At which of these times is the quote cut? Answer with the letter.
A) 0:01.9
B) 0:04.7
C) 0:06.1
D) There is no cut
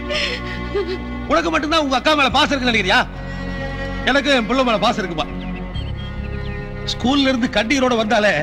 A